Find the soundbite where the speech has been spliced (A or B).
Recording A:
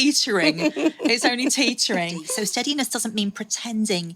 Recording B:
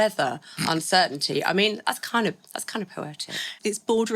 A